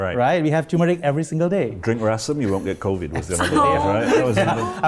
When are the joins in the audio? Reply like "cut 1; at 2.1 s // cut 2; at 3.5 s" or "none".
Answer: none